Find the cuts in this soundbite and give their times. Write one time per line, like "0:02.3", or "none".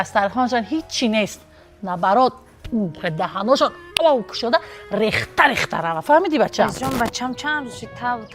0:06.7